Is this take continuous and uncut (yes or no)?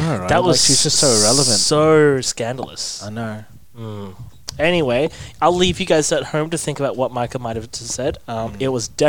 yes